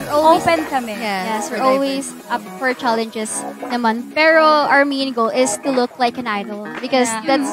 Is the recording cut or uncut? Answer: uncut